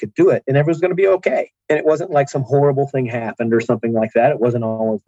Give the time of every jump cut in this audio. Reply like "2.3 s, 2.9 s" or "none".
1.5 s